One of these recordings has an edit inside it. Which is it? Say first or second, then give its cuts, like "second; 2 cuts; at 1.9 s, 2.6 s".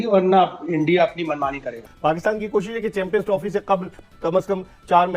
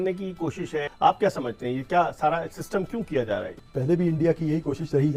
first; 1 cut; at 1.8 s